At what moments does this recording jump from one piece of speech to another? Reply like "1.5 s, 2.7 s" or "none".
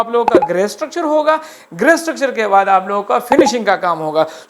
none